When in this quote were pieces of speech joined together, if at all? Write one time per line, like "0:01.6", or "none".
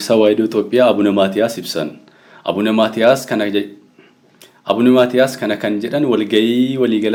none

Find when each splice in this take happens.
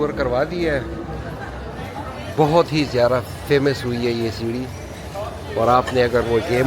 0:01.8

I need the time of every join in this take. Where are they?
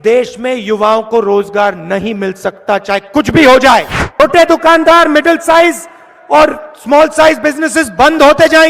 0:04.2

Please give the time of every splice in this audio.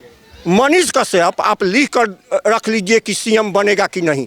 none

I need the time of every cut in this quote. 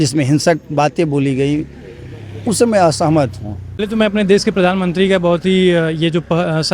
0:03.8

